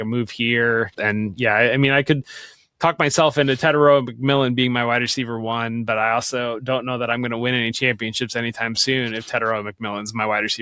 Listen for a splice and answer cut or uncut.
cut